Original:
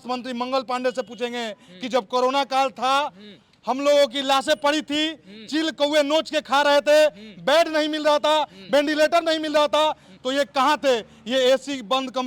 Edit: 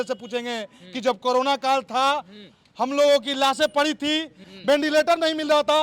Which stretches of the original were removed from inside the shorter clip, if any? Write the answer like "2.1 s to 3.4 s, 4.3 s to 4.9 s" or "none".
5.4 s to 8.6 s